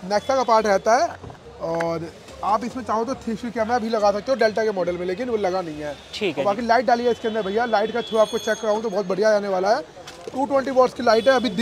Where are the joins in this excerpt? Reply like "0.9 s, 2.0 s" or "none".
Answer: none